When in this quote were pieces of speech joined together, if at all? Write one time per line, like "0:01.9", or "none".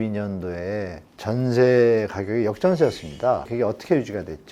0:01.0
0:03.5